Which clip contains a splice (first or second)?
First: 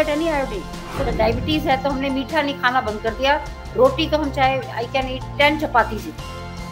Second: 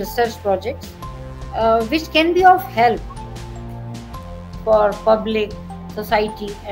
first